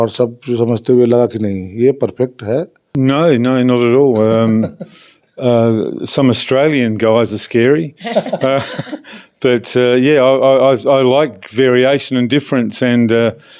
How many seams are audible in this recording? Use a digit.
1